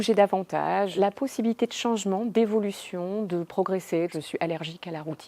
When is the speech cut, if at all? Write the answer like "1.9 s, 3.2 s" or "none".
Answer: 0.9 s, 4.1 s